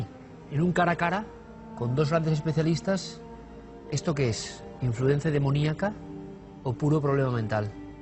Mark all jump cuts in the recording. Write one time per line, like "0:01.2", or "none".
0:04.0

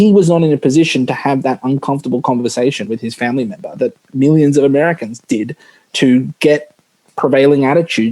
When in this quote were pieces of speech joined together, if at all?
none

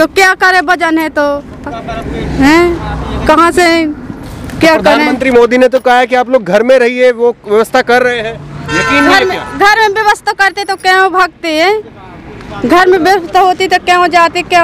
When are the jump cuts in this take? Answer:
none

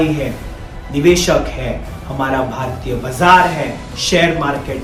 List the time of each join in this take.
none

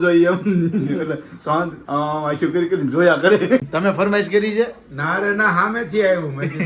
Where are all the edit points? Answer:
0:03.6

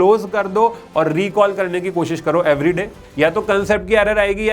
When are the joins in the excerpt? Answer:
0:03.0

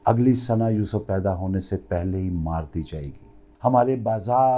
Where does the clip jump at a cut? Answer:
0:03.4

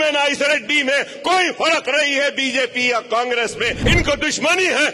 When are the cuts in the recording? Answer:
0:03.8

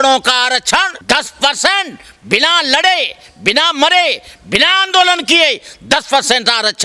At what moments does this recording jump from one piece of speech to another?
0:00.9

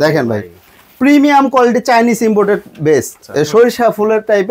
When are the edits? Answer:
0:03.2

